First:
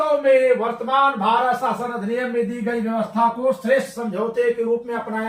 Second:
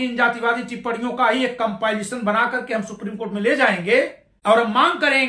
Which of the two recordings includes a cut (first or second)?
second